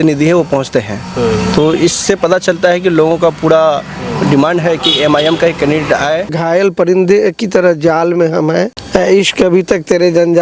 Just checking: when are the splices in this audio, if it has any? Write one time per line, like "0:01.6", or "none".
0:06.3
0:08.8